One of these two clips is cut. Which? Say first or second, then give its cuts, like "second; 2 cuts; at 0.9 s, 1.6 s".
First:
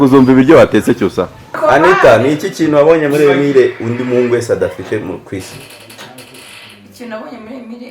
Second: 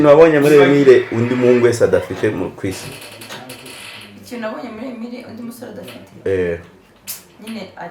first; 1 cut; at 1.6 s